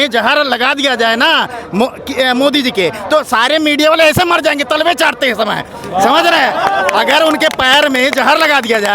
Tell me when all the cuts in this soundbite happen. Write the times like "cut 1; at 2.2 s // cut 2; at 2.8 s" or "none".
none